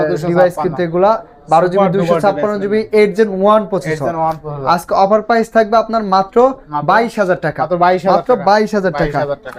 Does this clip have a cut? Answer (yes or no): no